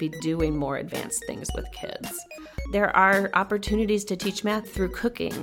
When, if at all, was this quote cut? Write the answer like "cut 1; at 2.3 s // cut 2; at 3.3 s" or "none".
cut 1; at 2.7 s // cut 2; at 4.7 s